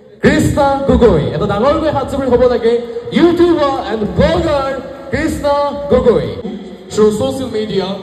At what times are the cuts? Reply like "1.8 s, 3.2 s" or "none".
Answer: none